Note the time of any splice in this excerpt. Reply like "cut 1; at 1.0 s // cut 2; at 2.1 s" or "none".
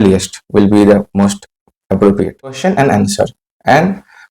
cut 1; at 2.6 s

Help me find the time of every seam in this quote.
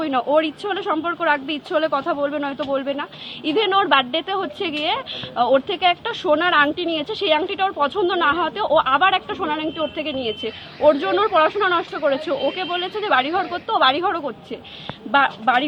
none

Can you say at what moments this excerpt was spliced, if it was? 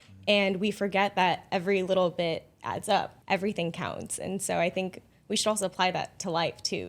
cut 1; at 3.1 s

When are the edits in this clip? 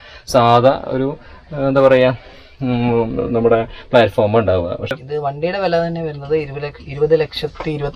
cut 1; at 4.9 s

